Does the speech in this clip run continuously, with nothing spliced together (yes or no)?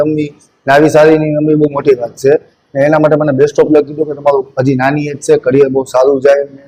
yes